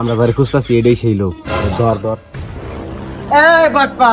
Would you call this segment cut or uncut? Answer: uncut